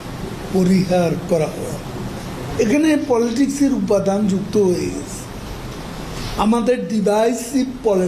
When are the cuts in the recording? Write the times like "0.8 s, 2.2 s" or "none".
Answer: 2.7 s